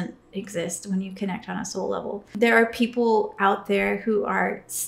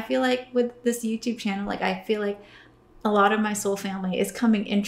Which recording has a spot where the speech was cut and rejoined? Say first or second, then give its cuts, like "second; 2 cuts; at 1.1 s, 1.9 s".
first; 1 cut; at 2.4 s